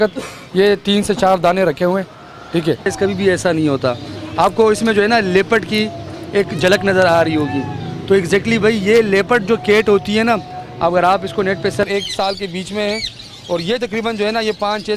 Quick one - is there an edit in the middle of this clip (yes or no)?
yes